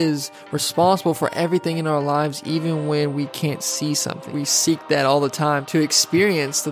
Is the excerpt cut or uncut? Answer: cut